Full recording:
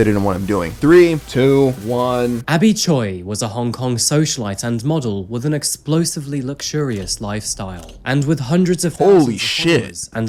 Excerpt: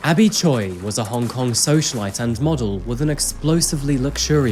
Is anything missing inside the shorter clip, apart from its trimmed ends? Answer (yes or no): no